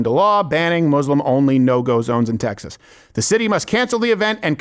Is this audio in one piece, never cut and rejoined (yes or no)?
yes